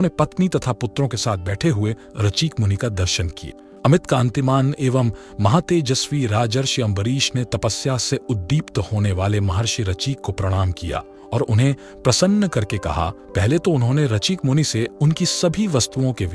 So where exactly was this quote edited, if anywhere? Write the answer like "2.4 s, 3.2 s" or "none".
none